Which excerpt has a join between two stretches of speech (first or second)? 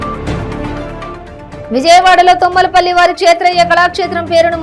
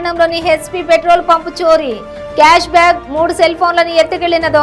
first